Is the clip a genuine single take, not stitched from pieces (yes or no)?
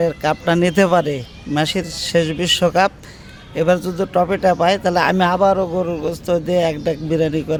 yes